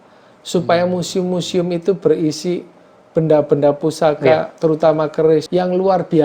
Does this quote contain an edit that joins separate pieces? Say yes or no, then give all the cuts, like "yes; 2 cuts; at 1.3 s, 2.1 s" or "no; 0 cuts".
no; 0 cuts